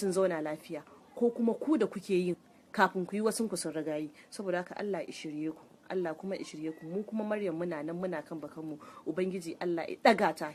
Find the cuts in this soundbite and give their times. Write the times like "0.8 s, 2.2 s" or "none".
none